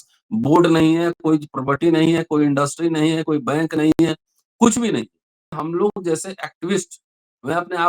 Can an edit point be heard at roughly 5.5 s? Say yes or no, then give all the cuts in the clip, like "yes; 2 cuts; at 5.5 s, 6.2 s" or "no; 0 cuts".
yes; 1 cut; at 5.5 s